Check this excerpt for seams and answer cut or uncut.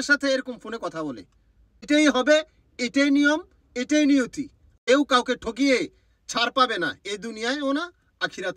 cut